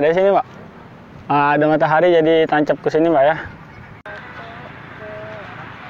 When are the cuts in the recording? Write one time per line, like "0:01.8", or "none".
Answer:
0:04.1